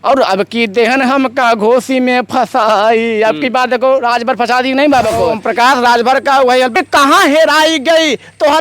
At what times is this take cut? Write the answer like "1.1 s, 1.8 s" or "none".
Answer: 5.4 s, 6.7 s